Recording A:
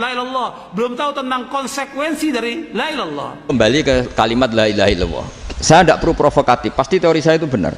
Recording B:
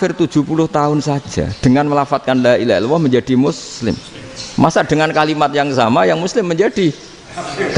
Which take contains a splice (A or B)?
A